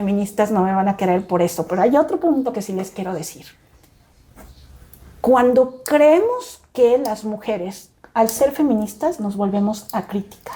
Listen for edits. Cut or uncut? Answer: uncut